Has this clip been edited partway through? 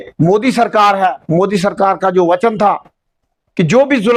no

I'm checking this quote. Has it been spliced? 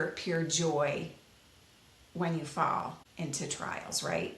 yes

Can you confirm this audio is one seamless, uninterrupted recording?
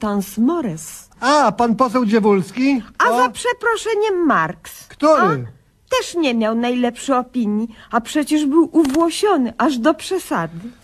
no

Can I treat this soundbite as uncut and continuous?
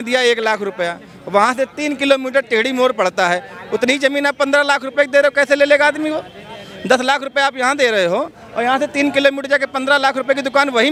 yes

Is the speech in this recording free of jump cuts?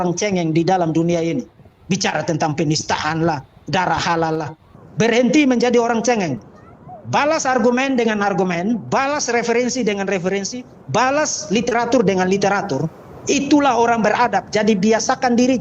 no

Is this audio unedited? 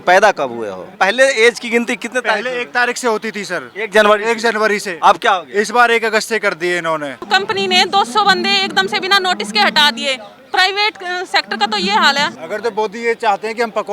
no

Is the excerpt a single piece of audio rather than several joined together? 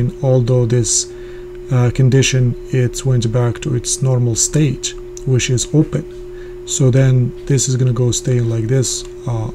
yes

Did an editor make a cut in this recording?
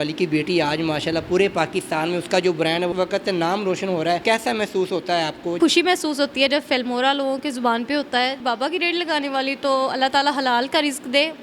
yes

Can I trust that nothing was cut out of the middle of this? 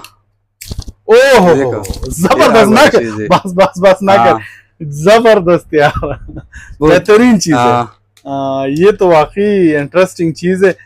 yes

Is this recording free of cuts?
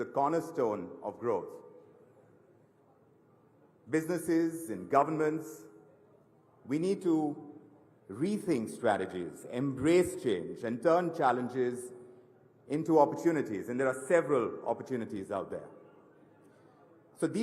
no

